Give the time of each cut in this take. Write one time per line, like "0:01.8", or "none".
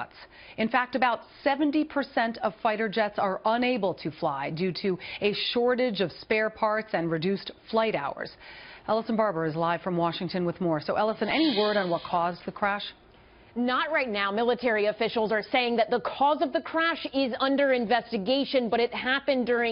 0:01.9